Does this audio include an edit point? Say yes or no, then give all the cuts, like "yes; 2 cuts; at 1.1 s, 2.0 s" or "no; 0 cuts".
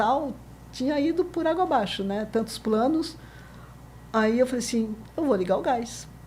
no; 0 cuts